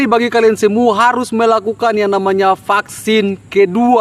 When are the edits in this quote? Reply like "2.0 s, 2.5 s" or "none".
none

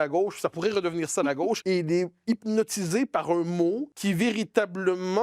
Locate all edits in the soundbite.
1.6 s, 3.9 s

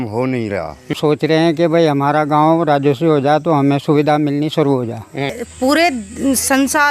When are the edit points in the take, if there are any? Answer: 0.9 s, 5.3 s

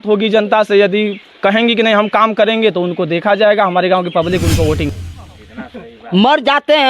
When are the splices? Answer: 4.9 s

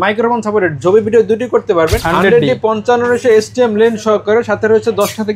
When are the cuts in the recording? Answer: 2.0 s

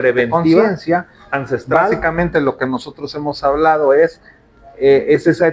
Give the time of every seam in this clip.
1.9 s

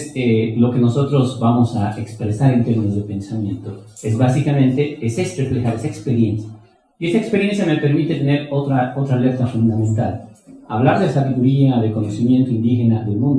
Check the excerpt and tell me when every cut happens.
none

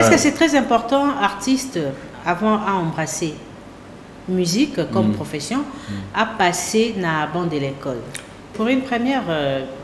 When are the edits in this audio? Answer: 8.5 s

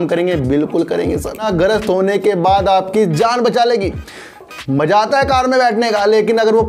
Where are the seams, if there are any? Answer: 1.5 s

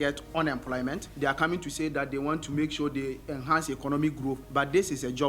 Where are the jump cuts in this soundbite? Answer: 1.1 s, 4.4 s

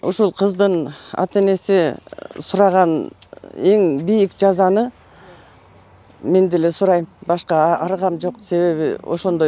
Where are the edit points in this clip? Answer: none

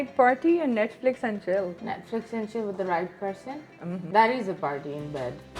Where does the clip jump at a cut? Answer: 1.8 s, 4.0 s

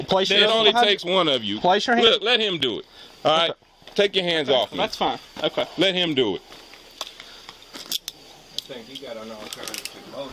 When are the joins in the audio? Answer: none

